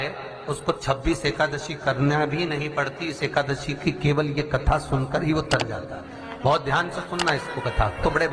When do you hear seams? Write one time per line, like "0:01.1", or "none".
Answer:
none